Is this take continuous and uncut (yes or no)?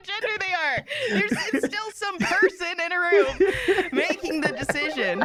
yes